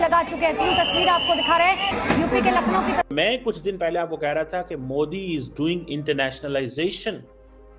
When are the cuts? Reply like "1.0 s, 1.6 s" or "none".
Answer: 3.1 s